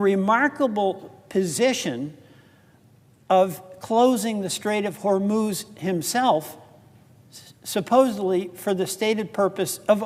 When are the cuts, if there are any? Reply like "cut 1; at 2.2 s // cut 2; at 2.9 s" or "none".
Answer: none